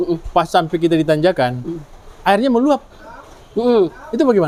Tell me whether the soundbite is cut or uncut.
uncut